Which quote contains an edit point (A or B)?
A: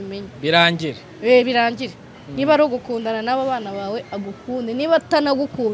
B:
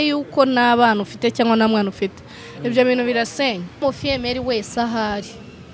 B